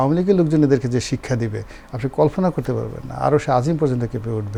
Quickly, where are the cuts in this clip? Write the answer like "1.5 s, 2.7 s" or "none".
none